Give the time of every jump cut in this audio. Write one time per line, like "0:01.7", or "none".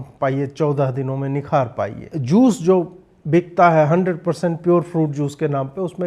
0:02.1